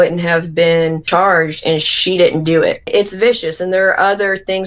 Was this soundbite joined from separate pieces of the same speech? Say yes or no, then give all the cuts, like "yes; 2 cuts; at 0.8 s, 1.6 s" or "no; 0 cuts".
yes; 1 cut; at 2.9 s